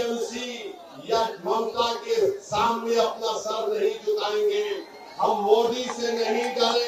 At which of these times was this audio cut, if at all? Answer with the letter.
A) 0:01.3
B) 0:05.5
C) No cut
C